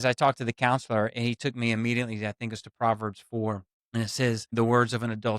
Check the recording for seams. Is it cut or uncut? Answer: cut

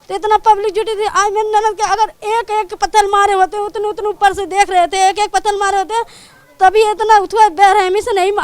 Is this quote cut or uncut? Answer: cut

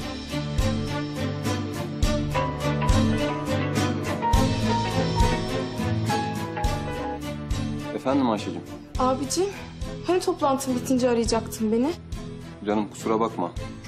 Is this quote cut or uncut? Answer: uncut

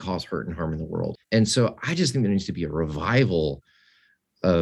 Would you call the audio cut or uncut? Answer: cut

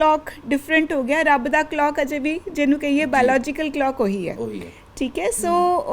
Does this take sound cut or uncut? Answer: uncut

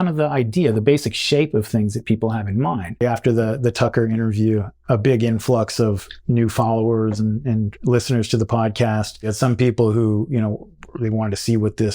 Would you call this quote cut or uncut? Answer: cut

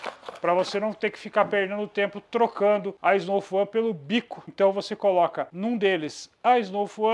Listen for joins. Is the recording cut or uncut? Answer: cut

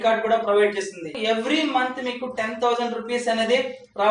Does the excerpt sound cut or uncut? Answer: cut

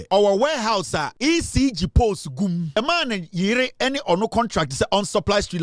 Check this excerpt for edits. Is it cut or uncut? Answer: cut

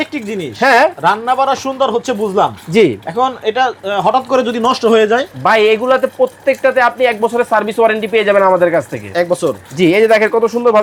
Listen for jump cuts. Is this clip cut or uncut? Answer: uncut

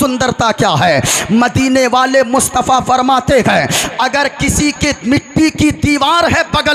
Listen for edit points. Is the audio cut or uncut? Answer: uncut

